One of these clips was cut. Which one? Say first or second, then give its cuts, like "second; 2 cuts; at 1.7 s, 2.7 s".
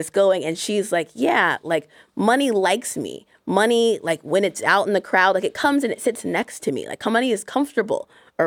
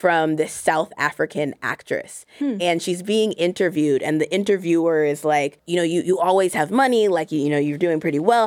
second; 1 cut; at 5.6 s